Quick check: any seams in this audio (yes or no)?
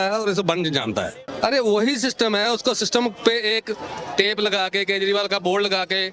yes